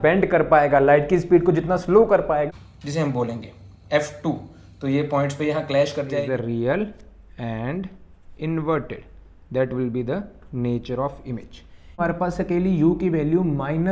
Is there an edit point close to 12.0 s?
yes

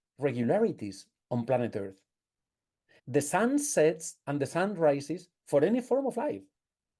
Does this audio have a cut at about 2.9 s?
yes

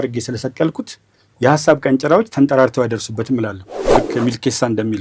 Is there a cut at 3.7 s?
yes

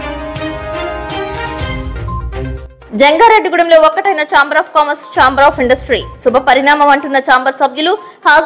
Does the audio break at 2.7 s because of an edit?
yes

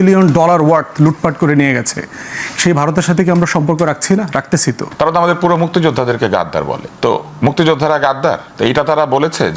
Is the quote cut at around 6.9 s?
yes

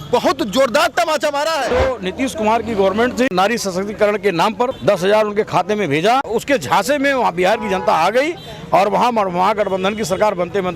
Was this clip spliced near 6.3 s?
yes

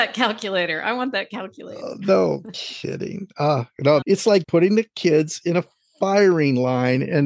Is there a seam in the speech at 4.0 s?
yes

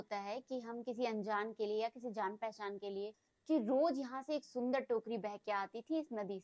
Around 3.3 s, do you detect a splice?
yes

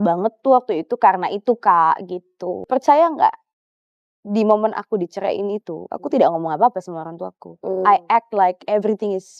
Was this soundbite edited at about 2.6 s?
yes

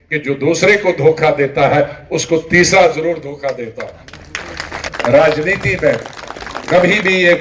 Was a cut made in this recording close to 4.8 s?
yes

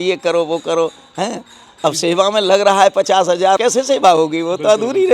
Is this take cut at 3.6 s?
yes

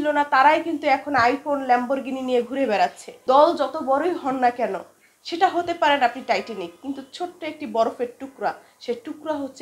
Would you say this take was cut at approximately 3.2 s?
yes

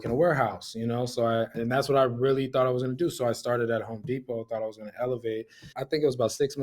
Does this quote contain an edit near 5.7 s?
yes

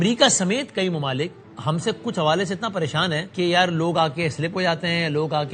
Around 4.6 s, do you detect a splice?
no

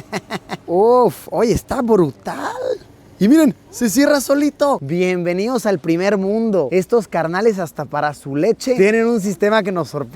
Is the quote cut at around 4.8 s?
yes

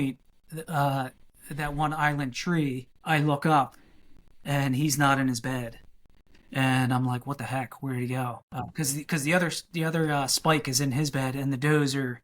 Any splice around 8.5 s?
yes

